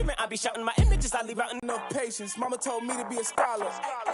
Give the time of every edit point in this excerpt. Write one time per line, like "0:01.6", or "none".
0:01.6

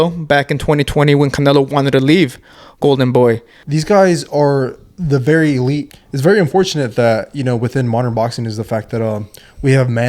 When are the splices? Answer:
0:03.5
0:05.9

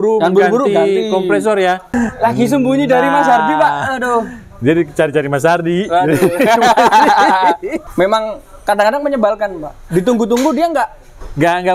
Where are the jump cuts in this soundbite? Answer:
0:01.9
0:07.8

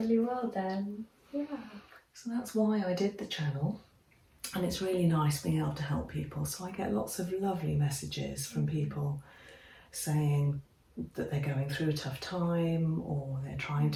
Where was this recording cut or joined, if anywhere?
none

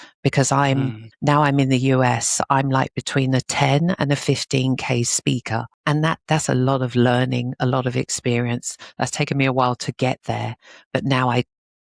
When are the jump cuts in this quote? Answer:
0:05.7

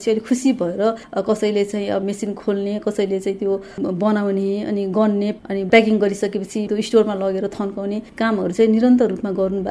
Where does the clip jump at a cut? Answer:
0:01.0
0:02.0
0:05.3
0:06.7

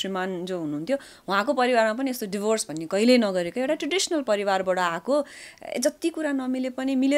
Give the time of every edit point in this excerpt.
none

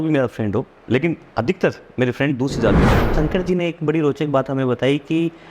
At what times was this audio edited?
0:03.1

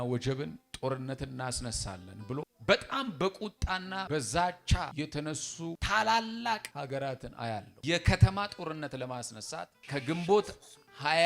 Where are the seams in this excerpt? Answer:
0:02.5
0:04.0
0:05.1
0:06.7
0:07.7
0:09.8

